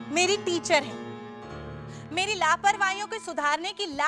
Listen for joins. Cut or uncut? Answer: uncut